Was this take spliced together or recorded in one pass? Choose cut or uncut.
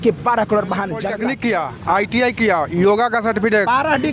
cut